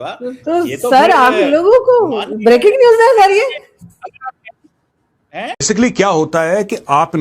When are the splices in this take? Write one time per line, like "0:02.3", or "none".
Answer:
0:05.6